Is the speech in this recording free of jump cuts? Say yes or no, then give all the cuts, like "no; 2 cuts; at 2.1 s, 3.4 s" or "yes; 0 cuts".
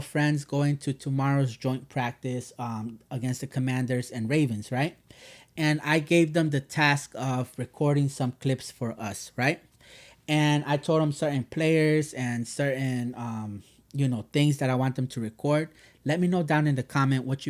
yes; 0 cuts